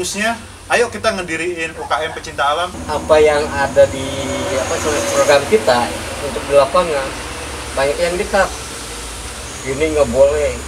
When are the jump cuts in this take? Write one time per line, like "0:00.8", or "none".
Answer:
0:02.8